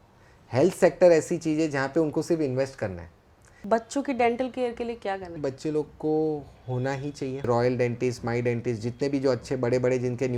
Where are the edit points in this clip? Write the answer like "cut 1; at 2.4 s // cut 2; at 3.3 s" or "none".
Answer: cut 1; at 3.6 s // cut 2; at 5.4 s // cut 3; at 7.5 s